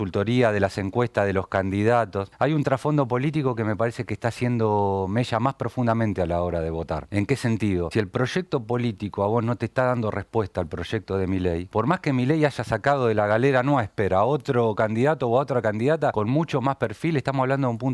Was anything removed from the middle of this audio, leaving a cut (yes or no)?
yes